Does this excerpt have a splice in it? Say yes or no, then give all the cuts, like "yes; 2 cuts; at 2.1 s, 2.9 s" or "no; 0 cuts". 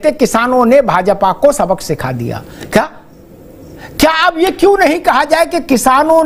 no; 0 cuts